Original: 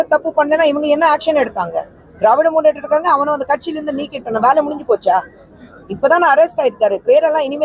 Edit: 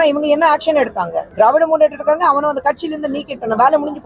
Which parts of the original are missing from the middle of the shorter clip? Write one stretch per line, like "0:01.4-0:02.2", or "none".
0:01.8-0:02.0